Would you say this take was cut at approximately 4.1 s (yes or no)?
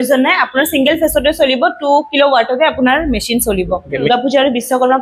yes